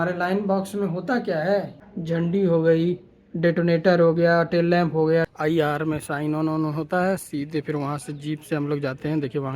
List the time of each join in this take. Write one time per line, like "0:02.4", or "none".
0:01.8
0:05.3